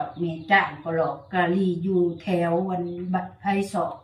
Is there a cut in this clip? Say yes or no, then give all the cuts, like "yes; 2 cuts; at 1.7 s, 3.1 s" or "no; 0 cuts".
no; 0 cuts